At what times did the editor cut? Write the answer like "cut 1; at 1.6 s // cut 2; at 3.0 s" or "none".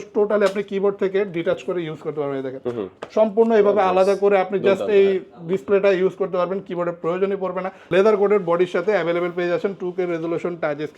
cut 1; at 7.8 s

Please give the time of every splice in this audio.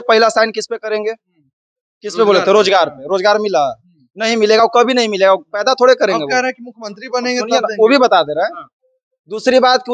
none

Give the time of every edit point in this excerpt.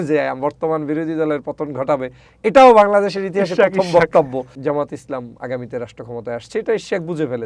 cut 1; at 4.5 s

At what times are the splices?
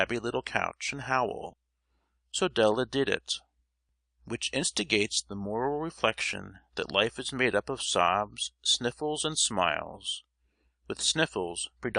cut 1; at 5.7 s

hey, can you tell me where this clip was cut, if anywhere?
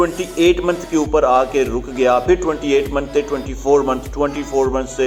none

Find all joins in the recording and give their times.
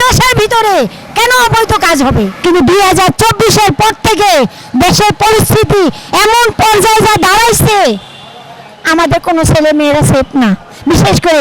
cut 1; at 2.3 s

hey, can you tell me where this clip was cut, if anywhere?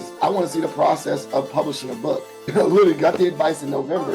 cut 1; at 2.4 s

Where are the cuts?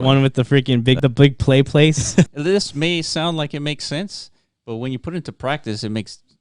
cut 1; at 1.0 s // cut 2; at 2.3 s

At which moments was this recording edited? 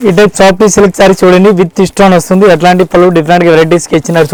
none

